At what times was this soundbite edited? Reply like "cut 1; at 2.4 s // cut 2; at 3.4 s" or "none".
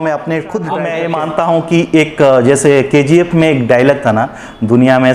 cut 1; at 1.0 s